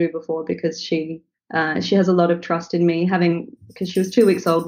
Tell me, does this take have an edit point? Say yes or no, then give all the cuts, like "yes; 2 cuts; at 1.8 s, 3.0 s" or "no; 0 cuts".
no; 0 cuts